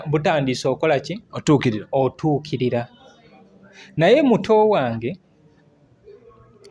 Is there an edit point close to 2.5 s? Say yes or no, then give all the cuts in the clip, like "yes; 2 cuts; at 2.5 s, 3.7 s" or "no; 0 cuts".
no; 0 cuts